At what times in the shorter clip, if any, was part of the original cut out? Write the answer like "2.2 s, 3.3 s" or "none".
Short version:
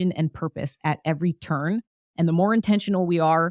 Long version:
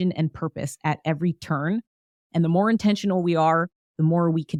2.0 s